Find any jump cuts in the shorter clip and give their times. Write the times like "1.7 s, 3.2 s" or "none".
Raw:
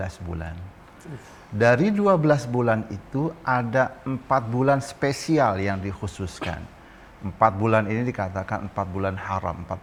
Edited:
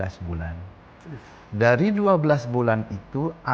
none